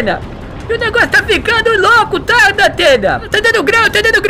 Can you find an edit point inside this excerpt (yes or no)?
yes